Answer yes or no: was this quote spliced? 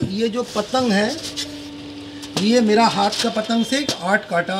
no